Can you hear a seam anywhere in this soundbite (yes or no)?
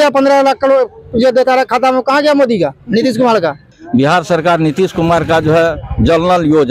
yes